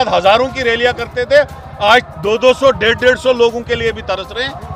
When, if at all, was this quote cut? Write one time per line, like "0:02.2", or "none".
none